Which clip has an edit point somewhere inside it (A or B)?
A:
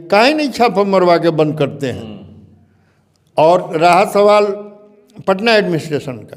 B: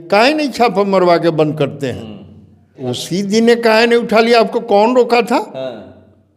B